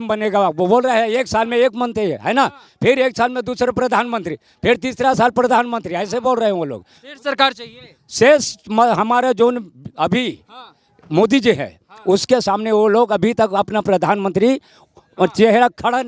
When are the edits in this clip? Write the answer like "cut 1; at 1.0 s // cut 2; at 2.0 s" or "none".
none